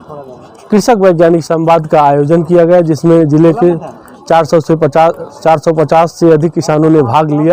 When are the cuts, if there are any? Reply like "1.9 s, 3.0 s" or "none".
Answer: none